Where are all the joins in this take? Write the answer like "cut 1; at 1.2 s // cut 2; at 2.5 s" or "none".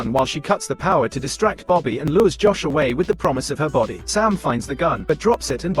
cut 1; at 4.0 s